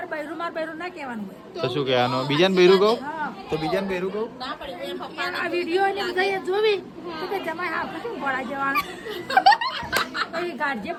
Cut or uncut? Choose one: uncut